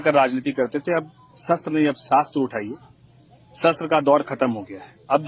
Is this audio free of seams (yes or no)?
yes